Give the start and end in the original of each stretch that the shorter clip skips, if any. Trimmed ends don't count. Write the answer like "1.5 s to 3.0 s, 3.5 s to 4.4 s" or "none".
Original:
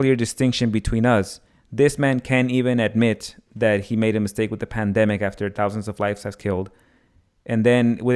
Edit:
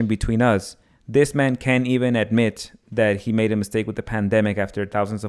none